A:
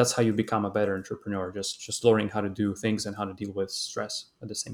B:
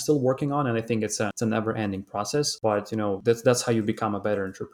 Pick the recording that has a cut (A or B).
B